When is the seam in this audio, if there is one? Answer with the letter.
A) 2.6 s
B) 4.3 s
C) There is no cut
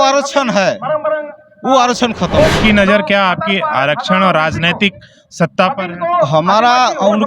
A